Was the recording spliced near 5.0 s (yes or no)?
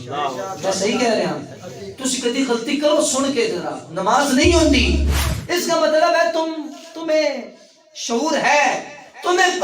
yes